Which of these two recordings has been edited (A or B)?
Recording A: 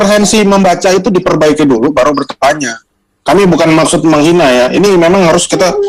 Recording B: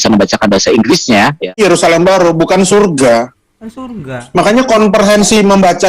B